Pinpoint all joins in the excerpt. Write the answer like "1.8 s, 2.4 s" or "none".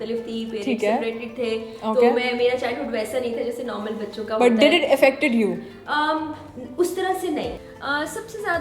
7.6 s